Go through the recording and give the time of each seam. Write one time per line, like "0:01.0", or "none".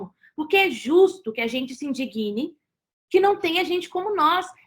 none